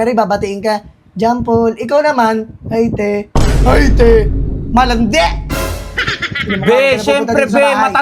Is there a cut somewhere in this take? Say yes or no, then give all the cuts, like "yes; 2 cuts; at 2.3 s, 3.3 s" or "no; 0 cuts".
no; 0 cuts